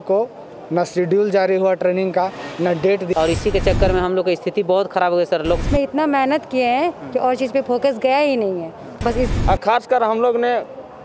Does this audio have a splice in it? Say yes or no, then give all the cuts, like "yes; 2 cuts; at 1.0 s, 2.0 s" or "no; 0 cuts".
yes; 3 cuts; at 3.1 s, 5.6 s, 9.3 s